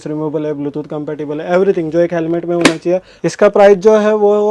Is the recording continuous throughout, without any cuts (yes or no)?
no